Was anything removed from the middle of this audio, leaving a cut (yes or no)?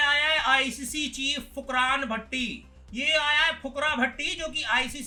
no